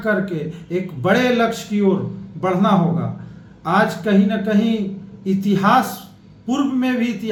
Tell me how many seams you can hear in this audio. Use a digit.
0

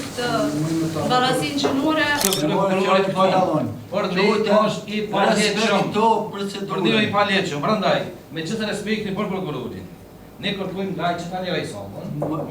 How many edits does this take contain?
1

